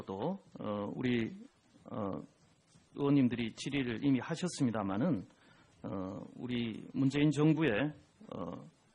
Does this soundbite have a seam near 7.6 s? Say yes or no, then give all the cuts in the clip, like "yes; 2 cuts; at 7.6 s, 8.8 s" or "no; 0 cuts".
yes; 1 cut; at 7.6 s